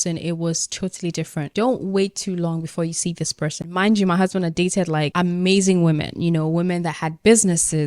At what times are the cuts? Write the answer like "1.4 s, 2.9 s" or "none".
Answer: 1.5 s, 3.6 s